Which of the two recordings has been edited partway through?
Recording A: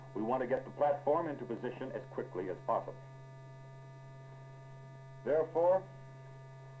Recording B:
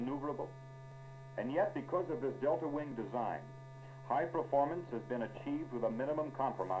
A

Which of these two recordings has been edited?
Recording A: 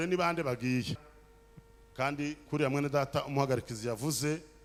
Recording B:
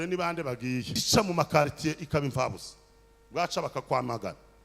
B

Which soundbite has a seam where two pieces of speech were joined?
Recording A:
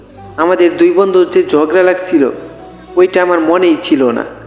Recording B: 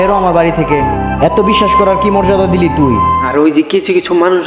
B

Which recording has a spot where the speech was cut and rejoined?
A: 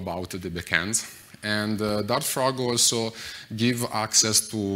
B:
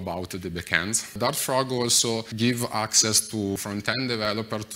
B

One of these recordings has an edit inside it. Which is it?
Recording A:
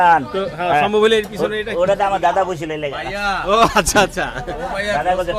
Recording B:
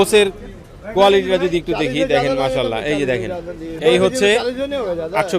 B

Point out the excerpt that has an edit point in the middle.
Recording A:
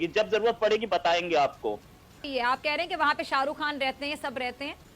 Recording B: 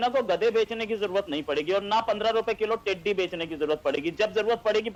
A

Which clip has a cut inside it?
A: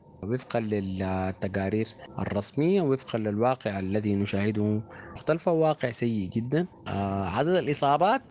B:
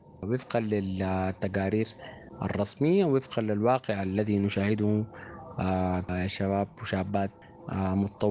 A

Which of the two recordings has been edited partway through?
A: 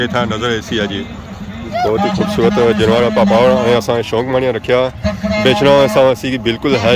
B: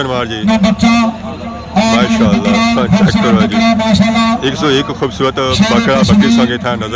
A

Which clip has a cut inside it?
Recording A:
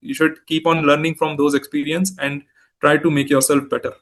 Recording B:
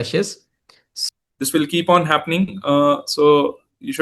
B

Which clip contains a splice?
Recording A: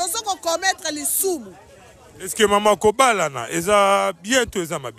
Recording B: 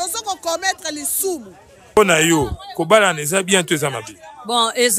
B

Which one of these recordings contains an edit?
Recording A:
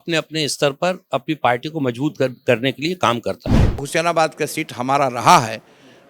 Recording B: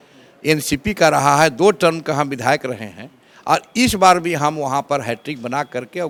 A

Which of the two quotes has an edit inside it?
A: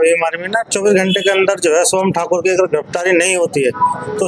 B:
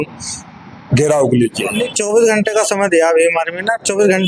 B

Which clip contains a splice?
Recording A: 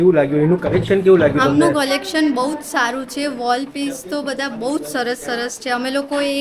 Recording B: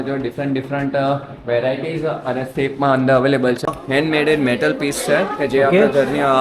B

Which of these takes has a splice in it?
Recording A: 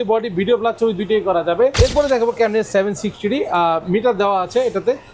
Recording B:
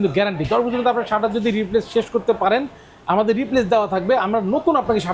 A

